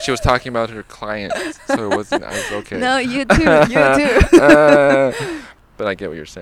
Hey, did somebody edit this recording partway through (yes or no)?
yes